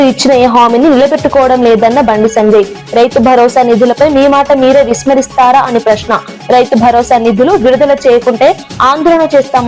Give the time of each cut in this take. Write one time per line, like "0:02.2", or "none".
none